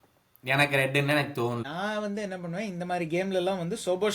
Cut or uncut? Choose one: cut